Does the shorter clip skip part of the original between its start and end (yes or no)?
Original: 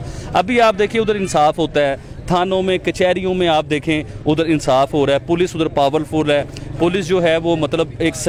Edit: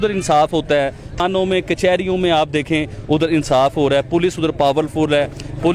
yes